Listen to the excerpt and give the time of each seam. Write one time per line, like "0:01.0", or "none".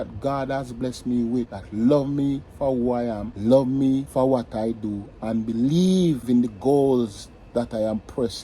0:01.6
0:03.3
0:04.1
0:06.2